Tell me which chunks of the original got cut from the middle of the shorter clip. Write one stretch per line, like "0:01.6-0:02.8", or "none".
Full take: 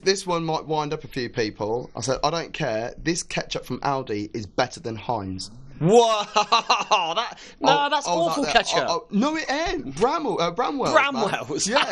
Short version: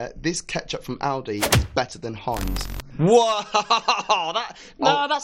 none